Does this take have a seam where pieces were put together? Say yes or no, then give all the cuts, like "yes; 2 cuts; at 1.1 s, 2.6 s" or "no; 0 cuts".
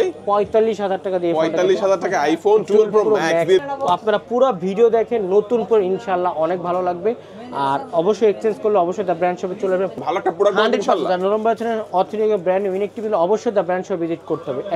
yes; 2 cuts; at 3.6 s, 10.0 s